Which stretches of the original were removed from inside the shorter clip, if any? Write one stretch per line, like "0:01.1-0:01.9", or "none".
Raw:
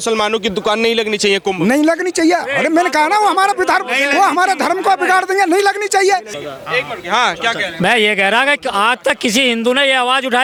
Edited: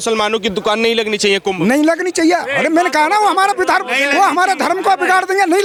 none